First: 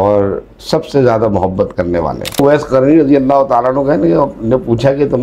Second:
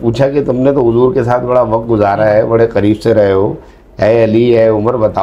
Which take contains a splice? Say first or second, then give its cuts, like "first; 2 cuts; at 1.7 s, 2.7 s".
first; 1 cut; at 2.4 s